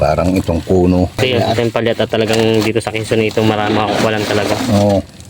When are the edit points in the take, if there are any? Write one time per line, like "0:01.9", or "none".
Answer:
0:01.2